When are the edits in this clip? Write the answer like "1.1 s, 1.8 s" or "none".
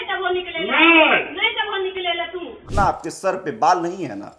2.6 s

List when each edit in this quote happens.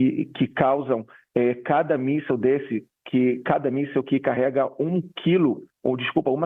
none

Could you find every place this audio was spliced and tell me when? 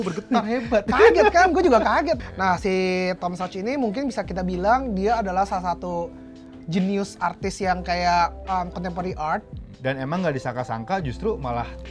2.2 s, 9.8 s

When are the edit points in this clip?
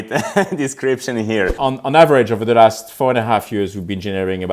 1.5 s

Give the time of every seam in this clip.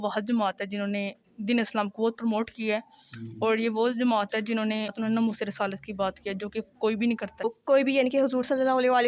4.9 s, 7.6 s

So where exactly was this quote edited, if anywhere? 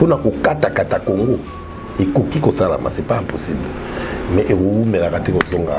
none

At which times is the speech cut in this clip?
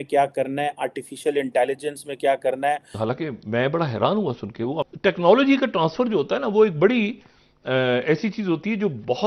3.0 s, 4.8 s

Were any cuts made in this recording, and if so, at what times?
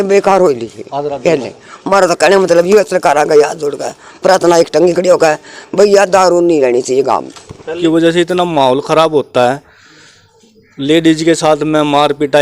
7.8 s

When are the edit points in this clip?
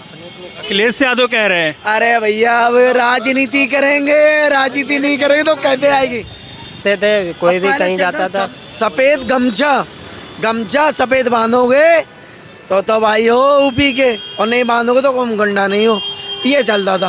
6.8 s

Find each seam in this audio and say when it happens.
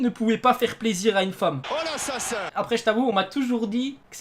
2.5 s

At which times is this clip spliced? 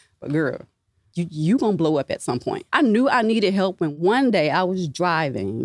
1.0 s, 2.5 s, 3.9 s

